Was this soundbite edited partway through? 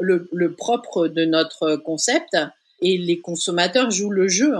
yes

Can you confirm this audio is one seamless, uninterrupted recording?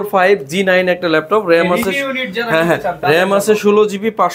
yes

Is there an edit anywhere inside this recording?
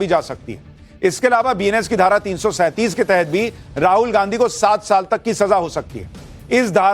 yes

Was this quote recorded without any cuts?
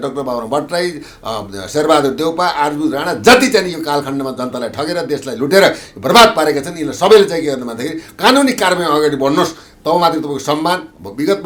yes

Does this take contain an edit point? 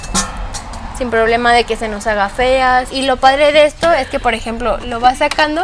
yes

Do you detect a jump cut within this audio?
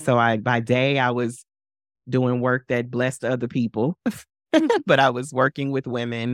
no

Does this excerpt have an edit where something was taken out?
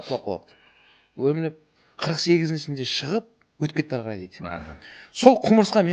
no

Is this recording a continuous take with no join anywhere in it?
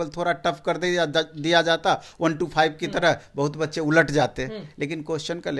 yes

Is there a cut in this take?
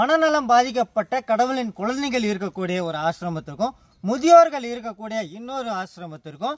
no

